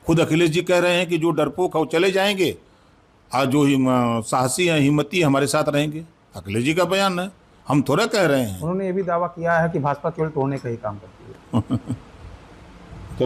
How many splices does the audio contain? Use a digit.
0